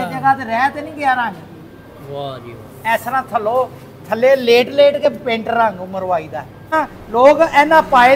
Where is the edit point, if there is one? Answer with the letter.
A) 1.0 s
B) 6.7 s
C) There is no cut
B